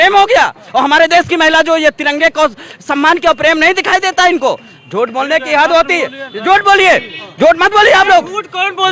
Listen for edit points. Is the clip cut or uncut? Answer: uncut